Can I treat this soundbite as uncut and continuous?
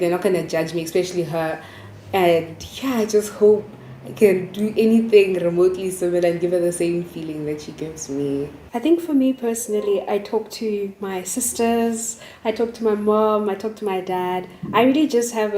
no; 1 cut; at 8.6 s

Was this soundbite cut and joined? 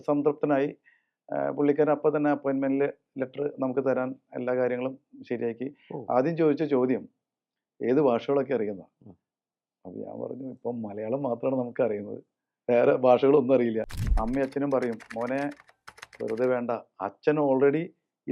yes; 1 cut; at 13.9 s

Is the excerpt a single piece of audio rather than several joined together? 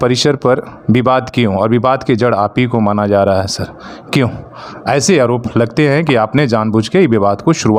yes; 0 cuts

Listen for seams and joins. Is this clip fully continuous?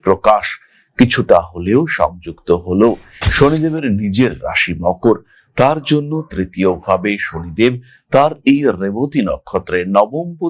no; 1 cut; at 3.1 s

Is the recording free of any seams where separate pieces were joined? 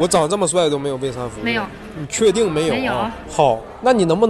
no; 2 cuts; at 1.4 s, 2.9 s

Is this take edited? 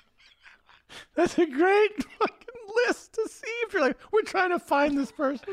no; 0 cuts

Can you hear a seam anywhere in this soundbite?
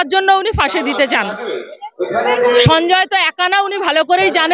no; 0 cuts

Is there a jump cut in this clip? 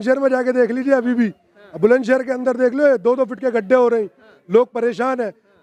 no; 0 cuts

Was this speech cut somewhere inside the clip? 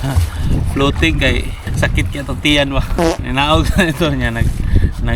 yes; 2 cuts; at 1.6 s, 3.1 s

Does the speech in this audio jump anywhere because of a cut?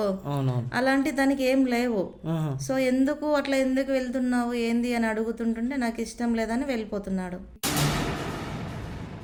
no; 0 cuts

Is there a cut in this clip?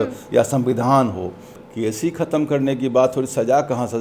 yes; 1 cut; at 1.5 s

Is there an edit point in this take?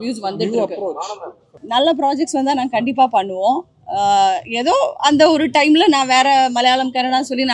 yes; 1 cut; at 1.5 s

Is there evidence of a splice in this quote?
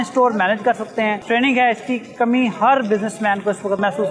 no; 0 cuts

